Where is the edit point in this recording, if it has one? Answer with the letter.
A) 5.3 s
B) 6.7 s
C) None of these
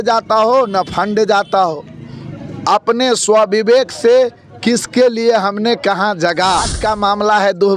B